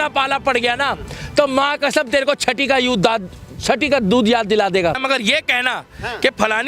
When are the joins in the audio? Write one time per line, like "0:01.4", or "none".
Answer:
0:05.0

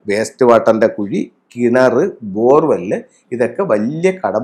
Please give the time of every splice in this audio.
none

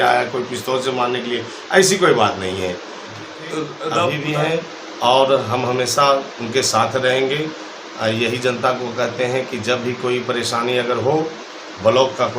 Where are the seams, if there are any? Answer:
0:04.2

